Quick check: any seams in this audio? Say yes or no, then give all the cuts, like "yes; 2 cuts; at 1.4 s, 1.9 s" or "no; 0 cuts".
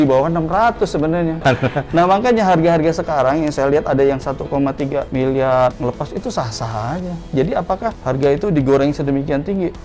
yes; 2 cuts; at 1.4 s, 7.2 s